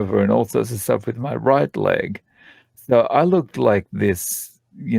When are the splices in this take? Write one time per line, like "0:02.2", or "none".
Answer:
none